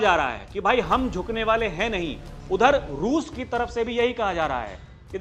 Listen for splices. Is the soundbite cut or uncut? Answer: uncut